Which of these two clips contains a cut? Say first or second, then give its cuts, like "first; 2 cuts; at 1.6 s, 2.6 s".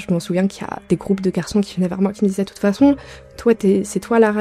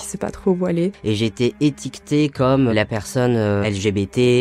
second; 3 cuts; at 1.0 s, 2.7 s, 3.6 s